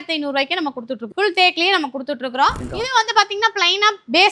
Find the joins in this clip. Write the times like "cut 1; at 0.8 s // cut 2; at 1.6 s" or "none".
cut 1; at 1.0 s // cut 2; at 2.6 s